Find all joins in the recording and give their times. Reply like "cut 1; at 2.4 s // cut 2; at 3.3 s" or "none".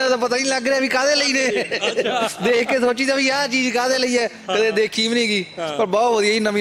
none